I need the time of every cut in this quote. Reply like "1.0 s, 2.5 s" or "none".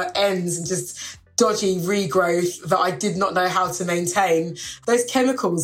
4.7 s